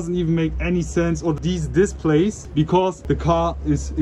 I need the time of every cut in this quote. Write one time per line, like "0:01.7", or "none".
none